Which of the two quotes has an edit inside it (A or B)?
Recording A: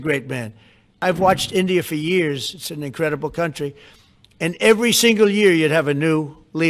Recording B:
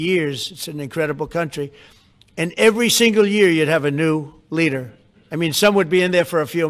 A